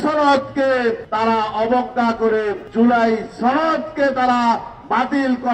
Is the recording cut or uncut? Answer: cut